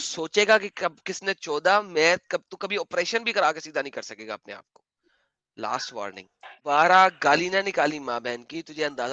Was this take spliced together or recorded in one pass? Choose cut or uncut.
cut